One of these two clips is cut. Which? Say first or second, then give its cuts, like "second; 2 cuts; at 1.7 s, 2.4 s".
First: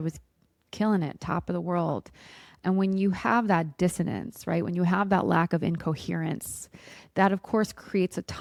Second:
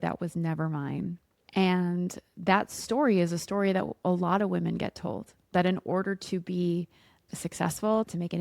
second; 2 cuts; at 1.3 s, 5.3 s